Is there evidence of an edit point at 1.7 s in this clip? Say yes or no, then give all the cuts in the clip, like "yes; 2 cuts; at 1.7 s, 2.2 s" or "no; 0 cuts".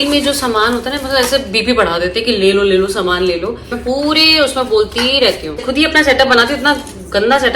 no; 2 cuts; at 3.8 s, 5.7 s